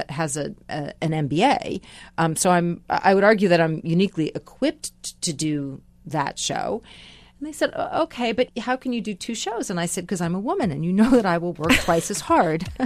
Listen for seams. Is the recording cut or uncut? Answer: cut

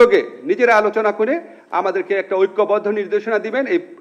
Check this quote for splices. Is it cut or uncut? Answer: uncut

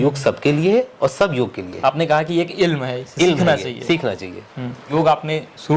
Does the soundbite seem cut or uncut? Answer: uncut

